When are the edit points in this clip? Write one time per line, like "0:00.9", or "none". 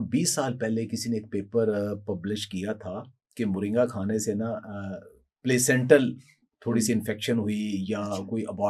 none